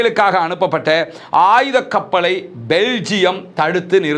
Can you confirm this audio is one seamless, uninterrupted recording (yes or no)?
yes